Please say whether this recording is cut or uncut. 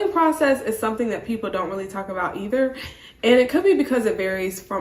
uncut